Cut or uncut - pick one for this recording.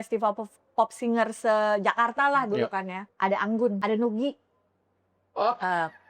cut